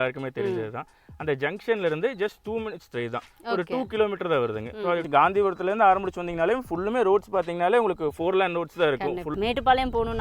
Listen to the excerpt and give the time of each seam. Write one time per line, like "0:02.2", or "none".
0:05.0
0:09.3